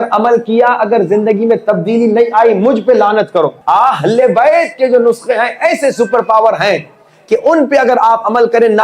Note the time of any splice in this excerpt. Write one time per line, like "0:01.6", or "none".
0:03.6